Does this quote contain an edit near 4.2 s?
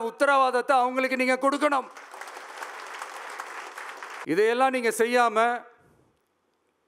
yes; 1 cut; at 4.2 s

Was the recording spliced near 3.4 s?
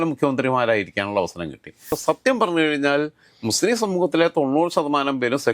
no; 1 cut; at 1.9 s

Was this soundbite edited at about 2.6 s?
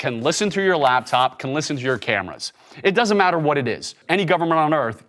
no; 1 cut; at 4.0 s

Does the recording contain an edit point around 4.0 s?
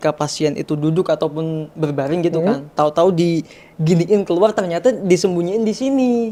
no; 0 cuts

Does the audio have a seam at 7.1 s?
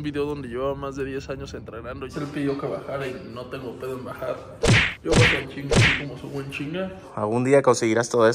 yes; 2 cuts; at 2.1 s, 7.1 s

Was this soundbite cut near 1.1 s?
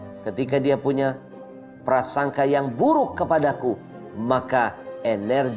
no; 0 cuts

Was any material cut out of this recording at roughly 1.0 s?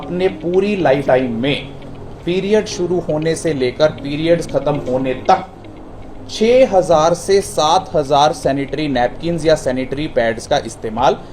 yes; 1 cut; at 1.0 s

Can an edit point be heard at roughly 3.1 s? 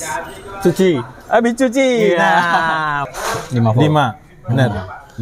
yes; 1 cut; at 3.1 s

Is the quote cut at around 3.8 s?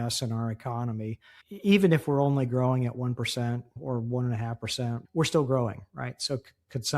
yes; 2 cuts; at 3.8 s, 5.0 s

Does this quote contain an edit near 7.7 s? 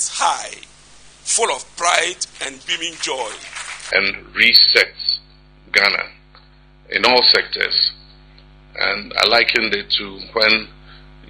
no; 1 cut; at 3.7 s

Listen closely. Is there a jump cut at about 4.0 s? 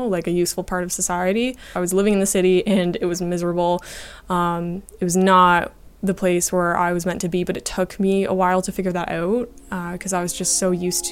no; 1 cut; at 1.3 s

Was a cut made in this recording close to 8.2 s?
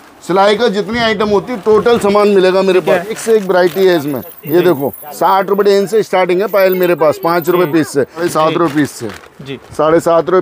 yes; 2 cuts; at 3.2 s, 8.2 s

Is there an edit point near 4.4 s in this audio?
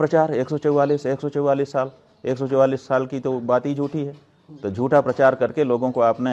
no; 0 cuts

